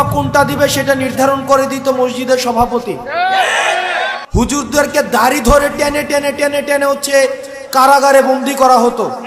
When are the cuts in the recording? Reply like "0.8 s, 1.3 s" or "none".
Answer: 4.2 s